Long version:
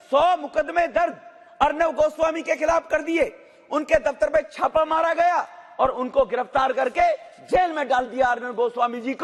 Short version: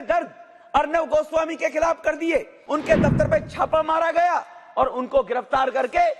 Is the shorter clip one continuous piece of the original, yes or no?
no